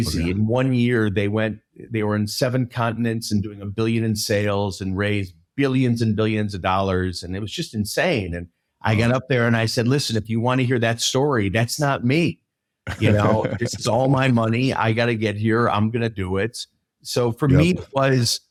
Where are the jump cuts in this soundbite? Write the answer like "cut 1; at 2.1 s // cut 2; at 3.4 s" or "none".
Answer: none